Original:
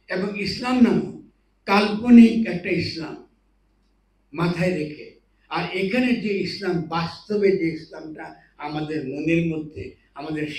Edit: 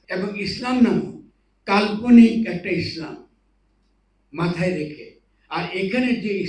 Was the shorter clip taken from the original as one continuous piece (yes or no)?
yes